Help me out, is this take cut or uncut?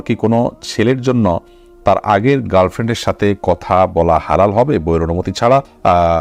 uncut